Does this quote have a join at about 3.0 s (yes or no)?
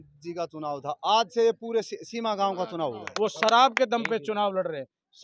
yes